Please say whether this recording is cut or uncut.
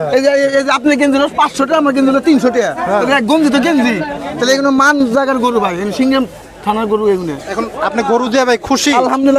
uncut